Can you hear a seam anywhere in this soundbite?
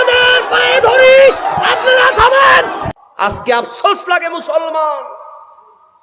yes; 1 cut; at 2.8 s

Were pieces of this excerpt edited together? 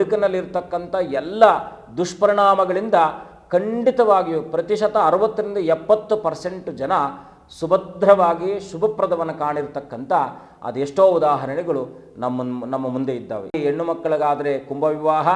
yes; 1 cut; at 13.5 s

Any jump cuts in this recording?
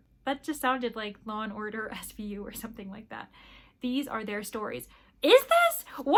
no; 0 cuts

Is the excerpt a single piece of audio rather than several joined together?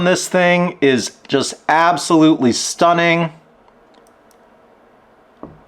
yes; 0 cuts

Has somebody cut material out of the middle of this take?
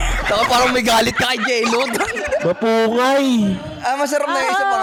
no; 0 cuts

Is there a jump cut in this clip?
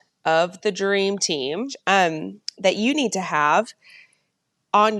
no; 0 cuts

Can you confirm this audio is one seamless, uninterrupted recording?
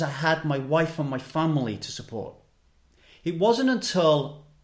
yes; 0 cuts

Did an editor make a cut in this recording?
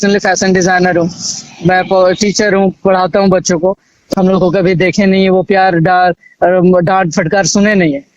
yes; 1 cut; at 4.0 s

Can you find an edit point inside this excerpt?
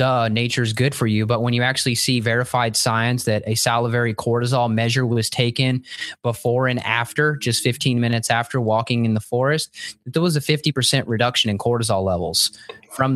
no; 0 cuts

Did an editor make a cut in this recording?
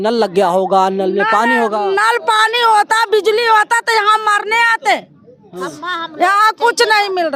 no; 0 cuts

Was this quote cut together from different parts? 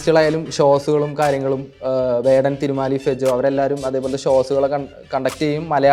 no; 0 cuts

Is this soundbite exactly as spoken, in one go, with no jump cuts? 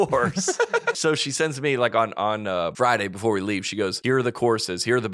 no; 3 cuts; at 1.0 s, 2.7 s, 4.0 s

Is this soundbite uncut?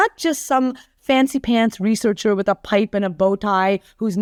yes; 0 cuts

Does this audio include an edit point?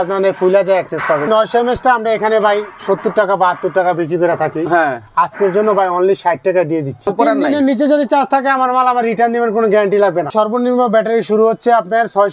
yes; 3 cuts; at 1.3 s, 7.1 s, 10.3 s

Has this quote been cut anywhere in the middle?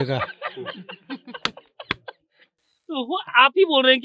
no; 0 cuts

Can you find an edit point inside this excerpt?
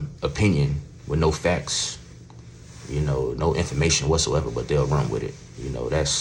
no; 0 cuts

